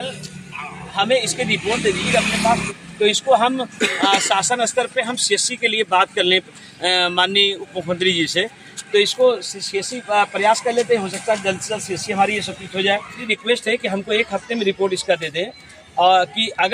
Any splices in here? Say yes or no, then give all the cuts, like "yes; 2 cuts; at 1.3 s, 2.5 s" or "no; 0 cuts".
yes; 2 cuts; at 2.6 s, 13.3 s